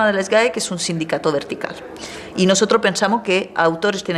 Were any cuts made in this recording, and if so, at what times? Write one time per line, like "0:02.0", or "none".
none